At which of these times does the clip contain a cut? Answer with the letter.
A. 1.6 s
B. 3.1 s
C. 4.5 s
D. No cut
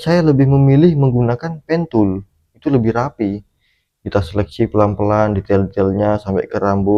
D